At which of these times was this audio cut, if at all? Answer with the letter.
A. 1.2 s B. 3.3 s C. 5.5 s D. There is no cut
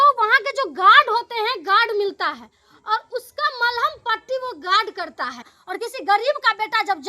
C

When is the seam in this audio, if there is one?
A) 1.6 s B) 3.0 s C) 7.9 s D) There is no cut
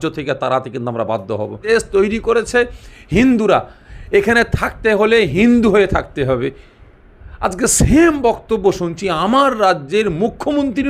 A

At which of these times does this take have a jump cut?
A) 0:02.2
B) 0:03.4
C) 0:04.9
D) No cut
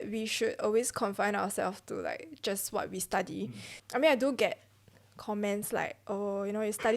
B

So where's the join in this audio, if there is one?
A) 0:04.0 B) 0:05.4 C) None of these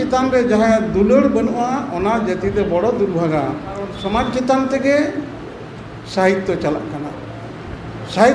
A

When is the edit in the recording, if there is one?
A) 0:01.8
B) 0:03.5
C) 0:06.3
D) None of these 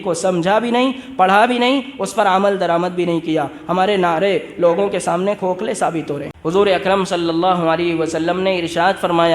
C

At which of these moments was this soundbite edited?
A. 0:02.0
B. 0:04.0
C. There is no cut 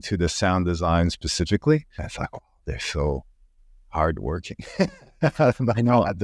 A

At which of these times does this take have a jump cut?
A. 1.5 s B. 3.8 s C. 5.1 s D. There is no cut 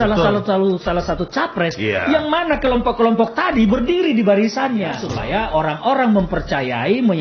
C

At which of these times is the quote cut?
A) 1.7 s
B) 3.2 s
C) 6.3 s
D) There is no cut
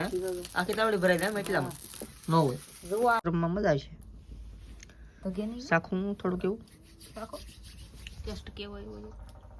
B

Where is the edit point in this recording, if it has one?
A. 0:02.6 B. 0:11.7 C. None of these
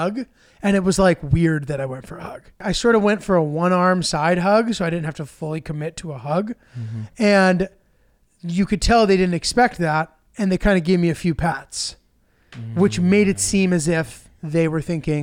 A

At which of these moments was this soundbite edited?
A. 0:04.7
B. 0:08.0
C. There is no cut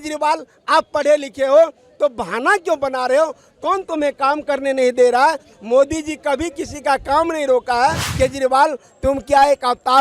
B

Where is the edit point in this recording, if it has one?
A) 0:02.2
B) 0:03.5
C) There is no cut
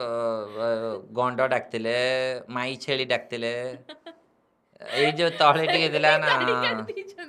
C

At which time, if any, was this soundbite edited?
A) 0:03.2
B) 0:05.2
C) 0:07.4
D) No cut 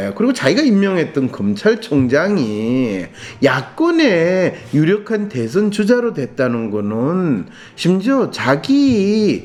D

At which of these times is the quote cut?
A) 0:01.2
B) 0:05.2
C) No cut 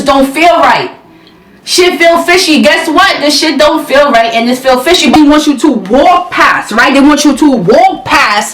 B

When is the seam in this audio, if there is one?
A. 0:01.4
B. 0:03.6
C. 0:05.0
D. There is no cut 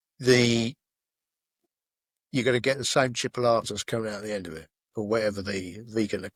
D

